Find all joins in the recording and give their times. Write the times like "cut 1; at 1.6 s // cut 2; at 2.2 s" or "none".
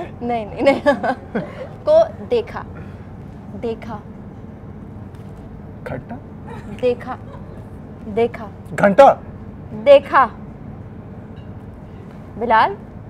none